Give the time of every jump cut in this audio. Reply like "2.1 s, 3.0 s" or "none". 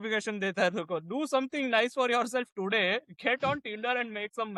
none

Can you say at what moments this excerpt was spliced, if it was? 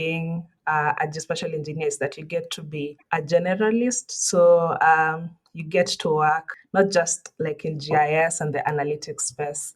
3.0 s, 6.6 s

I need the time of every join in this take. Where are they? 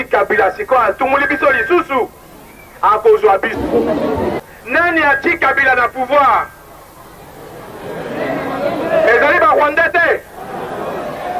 4.5 s

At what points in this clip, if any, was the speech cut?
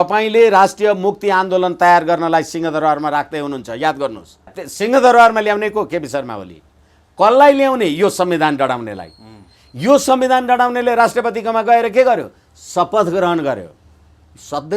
4.6 s

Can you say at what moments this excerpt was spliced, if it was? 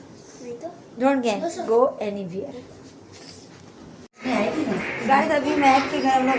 none

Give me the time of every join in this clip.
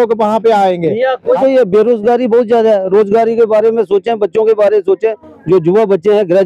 1.4 s

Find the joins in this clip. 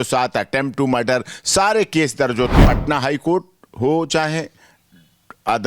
2.6 s

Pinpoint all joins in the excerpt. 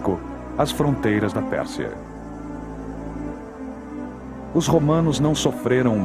2.2 s

